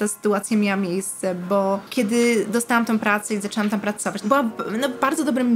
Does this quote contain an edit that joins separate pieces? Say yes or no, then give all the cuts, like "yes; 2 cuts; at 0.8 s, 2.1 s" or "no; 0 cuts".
yes; 2 cuts; at 1.9 s, 4.2 s